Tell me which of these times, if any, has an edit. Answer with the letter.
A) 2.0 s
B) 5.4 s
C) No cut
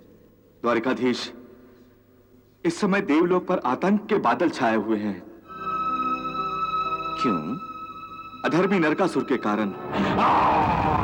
C